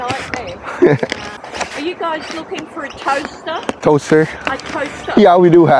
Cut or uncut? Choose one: cut